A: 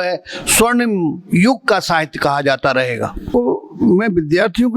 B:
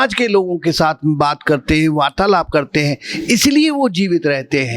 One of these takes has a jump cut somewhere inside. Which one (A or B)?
A